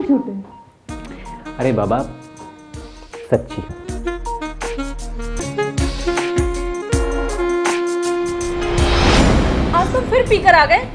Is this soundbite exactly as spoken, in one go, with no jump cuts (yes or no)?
no